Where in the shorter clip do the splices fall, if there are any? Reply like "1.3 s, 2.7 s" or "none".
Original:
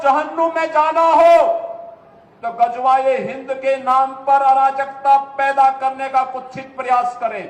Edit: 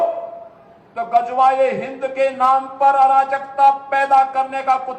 none